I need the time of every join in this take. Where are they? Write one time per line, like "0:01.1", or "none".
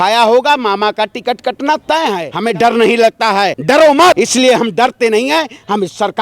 0:02.3
0:03.6
0:04.2